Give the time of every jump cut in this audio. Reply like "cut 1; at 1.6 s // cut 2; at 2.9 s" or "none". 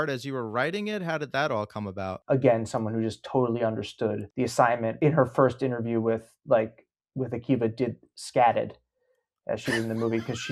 cut 1; at 2.1 s // cut 2; at 4.8 s